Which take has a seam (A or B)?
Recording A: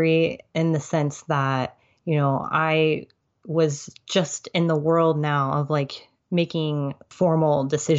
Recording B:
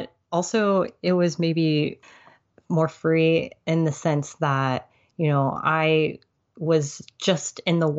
B